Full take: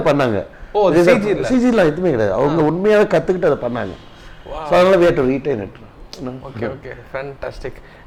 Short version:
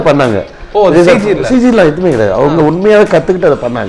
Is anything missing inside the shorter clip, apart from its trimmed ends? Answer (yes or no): no